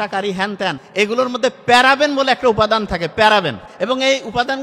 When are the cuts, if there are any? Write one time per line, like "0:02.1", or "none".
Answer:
0:00.8
0:03.6

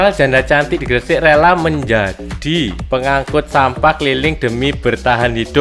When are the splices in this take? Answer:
none

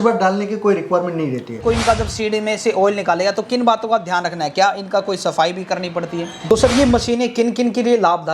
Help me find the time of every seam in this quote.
0:01.6
0:06.4

